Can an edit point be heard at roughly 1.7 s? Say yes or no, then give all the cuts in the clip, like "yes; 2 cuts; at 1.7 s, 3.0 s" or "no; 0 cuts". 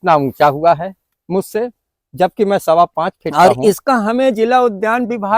no; 1 cut; at 3.2 s